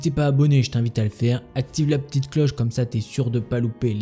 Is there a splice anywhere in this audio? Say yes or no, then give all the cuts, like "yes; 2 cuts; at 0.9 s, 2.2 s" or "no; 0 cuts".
no; 0 cuts